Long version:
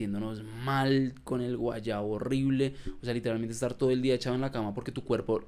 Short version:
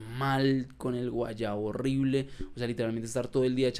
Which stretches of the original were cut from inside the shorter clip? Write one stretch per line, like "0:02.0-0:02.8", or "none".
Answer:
none